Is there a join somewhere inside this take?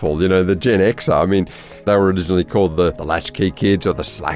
yes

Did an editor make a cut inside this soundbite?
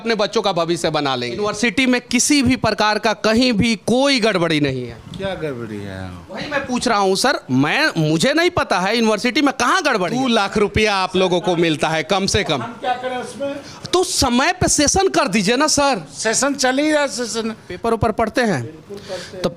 yes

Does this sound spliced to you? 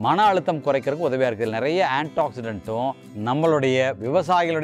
yes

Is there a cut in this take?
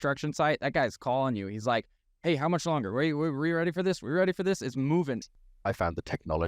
yes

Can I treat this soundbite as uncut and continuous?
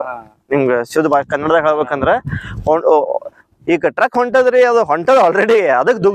yes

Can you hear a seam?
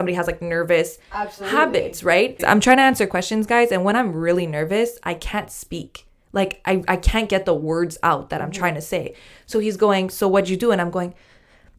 yes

